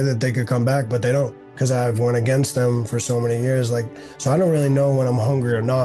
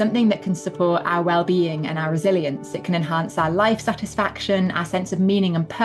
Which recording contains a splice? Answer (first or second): first